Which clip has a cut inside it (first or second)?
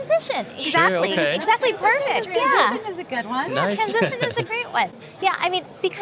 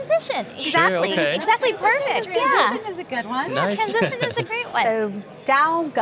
second